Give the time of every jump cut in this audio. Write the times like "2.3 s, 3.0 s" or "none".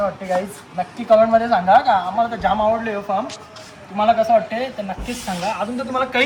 none